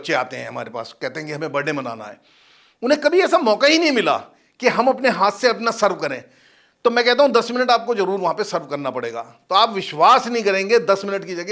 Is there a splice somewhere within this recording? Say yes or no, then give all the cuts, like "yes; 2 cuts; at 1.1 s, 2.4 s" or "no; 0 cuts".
no; 0 cuts